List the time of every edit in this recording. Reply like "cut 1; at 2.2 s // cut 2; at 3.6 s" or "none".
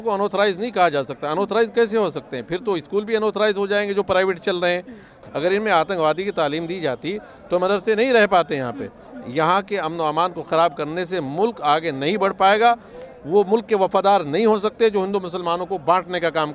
cut 1; at 5.1 s // cut 2; at 9.0 s